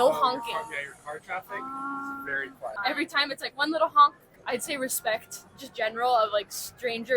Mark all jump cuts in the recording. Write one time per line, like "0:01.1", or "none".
0:02.7
0:04.3

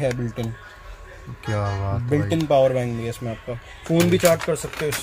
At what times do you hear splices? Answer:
none

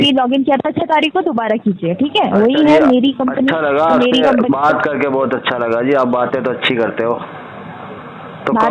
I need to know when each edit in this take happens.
none

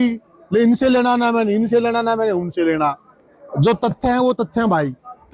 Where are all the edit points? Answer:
none

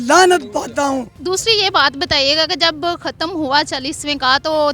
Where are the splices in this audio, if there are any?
0:01.1

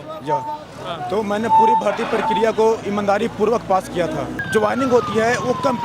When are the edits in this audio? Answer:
0:04.3

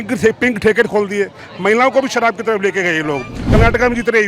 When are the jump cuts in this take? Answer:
0:03.4

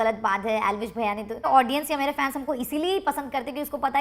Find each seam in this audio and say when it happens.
0:01.5

